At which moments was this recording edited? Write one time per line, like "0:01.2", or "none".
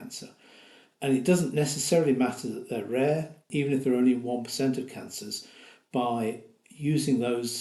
none